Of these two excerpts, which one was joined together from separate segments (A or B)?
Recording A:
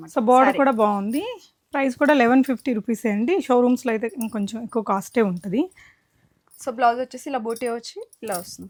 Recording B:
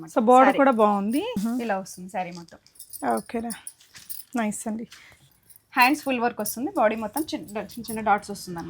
B